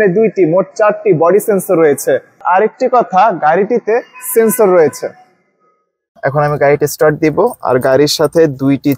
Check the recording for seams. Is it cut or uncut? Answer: cut